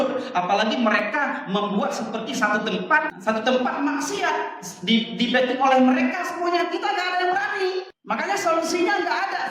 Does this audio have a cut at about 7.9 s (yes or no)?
yes